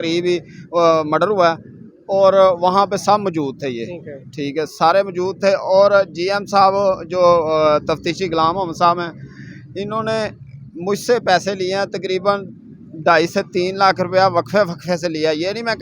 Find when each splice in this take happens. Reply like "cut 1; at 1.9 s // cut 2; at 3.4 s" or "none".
none